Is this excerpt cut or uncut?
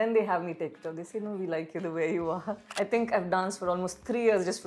cut